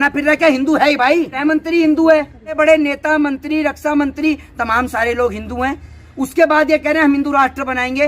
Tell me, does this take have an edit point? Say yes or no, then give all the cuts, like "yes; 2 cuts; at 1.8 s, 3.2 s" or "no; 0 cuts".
yes; 2 cuts; at 1.3 s, 2.6 s